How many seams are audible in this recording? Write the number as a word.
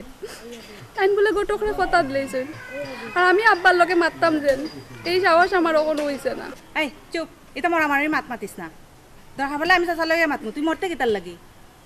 one